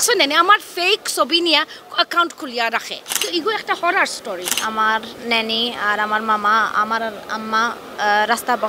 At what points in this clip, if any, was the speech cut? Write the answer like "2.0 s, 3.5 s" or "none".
3.2 s, 4.5 s